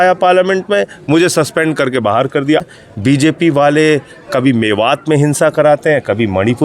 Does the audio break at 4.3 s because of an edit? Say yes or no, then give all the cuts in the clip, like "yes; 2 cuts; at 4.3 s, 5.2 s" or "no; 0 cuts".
no; 1 cut; at 2.6 s